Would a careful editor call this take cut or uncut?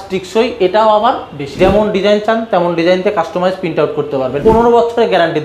cut